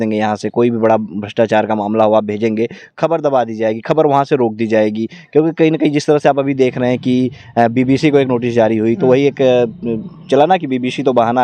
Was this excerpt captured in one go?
yes; 0 cuts

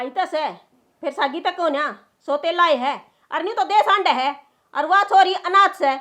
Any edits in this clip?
no; 0 cuts

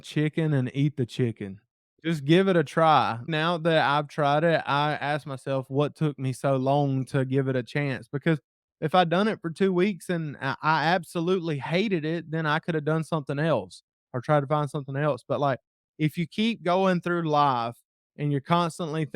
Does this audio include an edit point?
yes; 2 cuts; at 2.0 s, 3.3 s

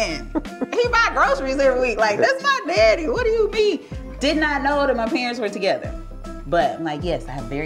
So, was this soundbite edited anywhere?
no; 0 cuts

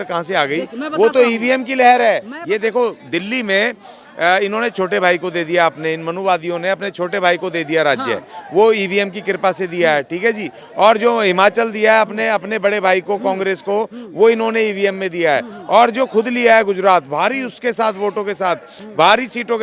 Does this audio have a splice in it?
yes; 1 cut; at 2.3 s

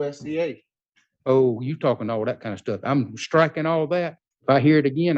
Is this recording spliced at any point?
yes; 1 cut; at 4.2 s

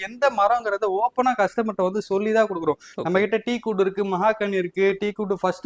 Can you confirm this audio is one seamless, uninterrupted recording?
yes; 0 cuts

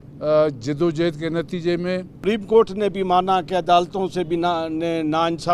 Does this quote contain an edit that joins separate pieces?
yes; 1 cut; at 2.2 s

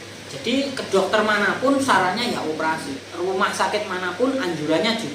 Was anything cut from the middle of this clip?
yes; 1 cut; at 2.9 s

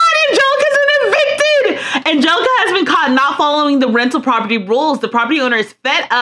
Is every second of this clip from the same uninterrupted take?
yes; 0 cuts

